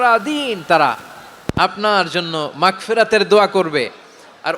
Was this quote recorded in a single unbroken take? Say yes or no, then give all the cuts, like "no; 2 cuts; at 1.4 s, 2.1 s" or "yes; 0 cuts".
yes; 0 cuts